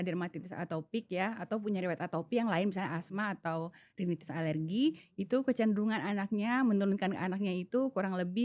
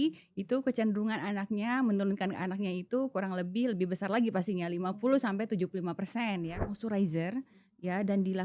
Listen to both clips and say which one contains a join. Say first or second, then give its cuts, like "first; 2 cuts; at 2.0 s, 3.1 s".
second; 1 cut; at 6.6 s